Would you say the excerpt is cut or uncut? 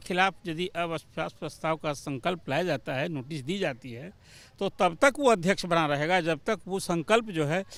uncut